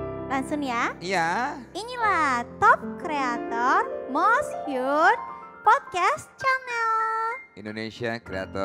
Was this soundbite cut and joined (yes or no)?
no